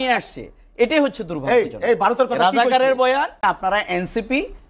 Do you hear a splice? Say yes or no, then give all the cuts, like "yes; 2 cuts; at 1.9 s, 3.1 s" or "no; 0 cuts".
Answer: yes; 1 cut; at 3.3 s